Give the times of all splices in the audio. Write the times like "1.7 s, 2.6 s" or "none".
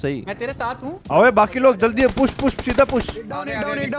0.9 s

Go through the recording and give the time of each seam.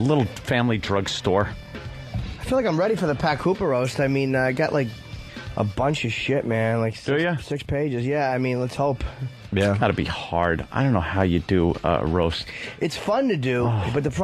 2.6 s

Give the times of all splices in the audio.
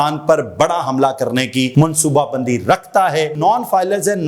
1.7 s, 3.4 s

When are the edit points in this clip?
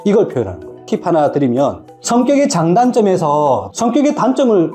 0.8 s, 3.7 s

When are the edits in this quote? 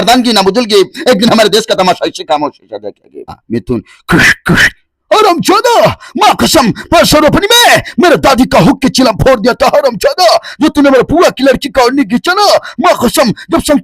3.4 s

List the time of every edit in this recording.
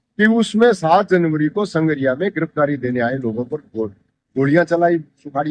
none

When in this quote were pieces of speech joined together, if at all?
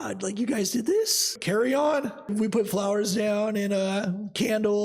1.3 s, 2.3 s

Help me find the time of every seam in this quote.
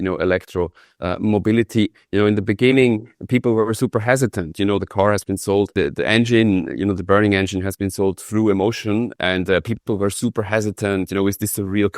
5.7 s, 9.1 s

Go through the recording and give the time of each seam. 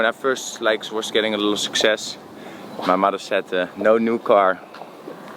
none

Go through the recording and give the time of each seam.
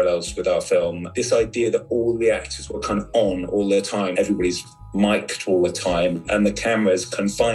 1.0 s, 4.1 s

